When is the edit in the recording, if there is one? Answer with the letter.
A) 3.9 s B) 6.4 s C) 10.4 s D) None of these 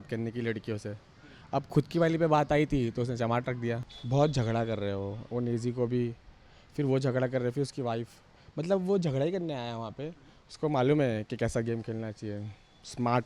A